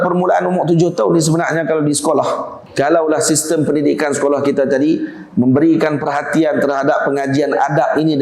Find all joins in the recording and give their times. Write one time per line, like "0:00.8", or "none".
0:02.6